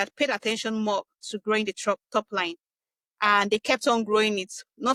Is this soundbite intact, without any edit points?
yes; 0 cuts

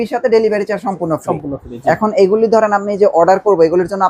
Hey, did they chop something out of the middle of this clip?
no; 0 cuts

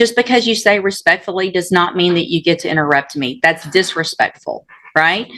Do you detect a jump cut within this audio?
no; 0 cuts

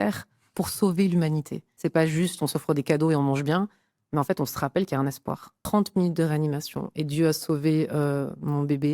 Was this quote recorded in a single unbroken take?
no; 2 cuts; at 1.7 s, 5.5 s

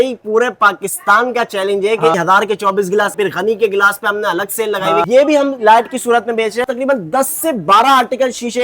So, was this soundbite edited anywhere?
yes; 4 cuts; at 2.1 s, 3.1 s, 5.0 s, 6.6 s

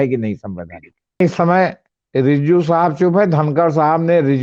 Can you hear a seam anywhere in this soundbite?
yes; 1 cut; at 1.2 s

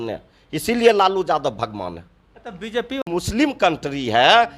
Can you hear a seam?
yes; 1 cut; at 3.0 s

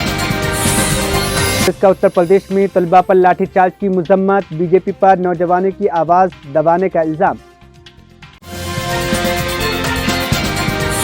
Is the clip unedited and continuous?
yes; 0 cuts

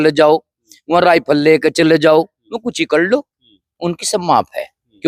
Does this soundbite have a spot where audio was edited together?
no; 0 cuts

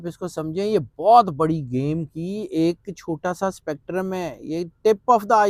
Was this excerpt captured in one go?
yes; 0 cuts

